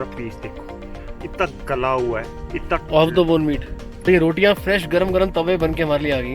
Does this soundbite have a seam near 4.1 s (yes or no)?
yes